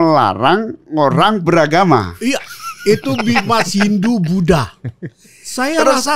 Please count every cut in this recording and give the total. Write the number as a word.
zero